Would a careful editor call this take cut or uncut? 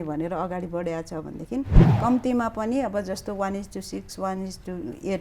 cut